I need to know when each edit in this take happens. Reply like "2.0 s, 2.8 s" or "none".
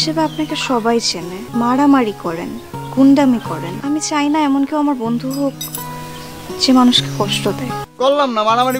1.4 s, 3.7 s, 7.8 s